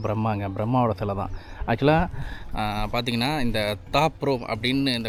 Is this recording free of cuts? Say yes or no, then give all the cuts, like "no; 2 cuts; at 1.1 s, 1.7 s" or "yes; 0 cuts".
yes; 0 cuts